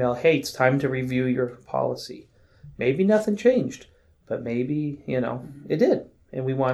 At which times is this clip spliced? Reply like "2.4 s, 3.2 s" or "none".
none